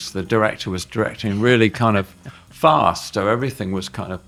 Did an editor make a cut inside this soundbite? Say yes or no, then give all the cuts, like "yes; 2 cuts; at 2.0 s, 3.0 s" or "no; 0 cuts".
no; 0 cuts